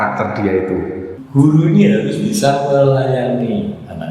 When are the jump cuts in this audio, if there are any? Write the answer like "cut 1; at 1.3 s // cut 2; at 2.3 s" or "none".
cut 1; at 1.2 s